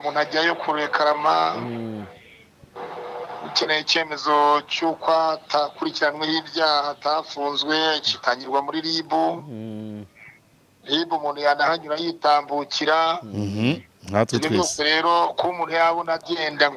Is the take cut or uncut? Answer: uncut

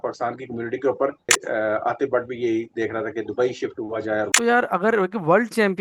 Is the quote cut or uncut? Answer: cut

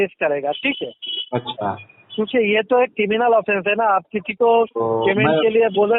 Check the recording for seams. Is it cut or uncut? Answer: uncut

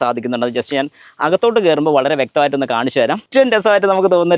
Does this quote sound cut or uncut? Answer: cut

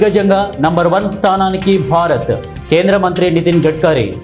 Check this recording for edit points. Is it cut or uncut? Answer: uncut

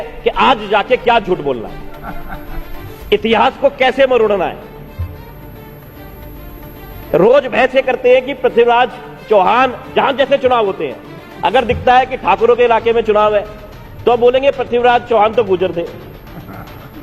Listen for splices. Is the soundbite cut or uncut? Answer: uncut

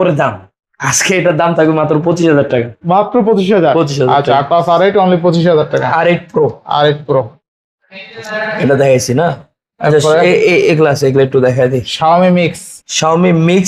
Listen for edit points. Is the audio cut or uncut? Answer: uncut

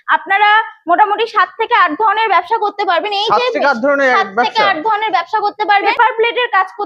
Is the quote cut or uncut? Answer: cut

